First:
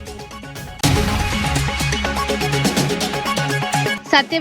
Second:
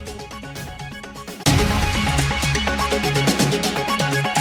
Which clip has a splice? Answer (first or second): first